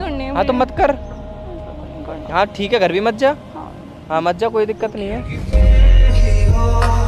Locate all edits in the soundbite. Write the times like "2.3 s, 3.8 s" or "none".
none